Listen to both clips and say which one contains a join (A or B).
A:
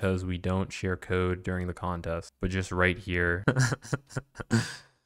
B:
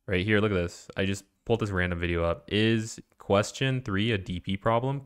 A